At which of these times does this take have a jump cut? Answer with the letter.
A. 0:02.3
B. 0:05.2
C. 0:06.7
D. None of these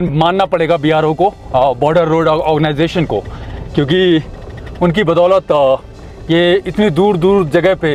D